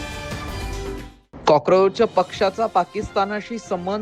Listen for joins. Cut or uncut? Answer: cut